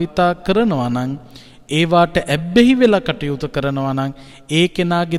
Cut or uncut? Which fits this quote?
uncut